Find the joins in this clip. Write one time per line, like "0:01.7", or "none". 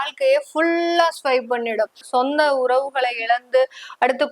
0:02.1